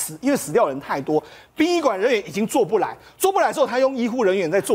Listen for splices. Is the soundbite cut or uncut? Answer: uncut